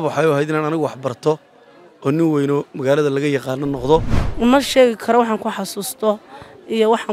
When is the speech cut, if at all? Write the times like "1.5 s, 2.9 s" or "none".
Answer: 4.2 s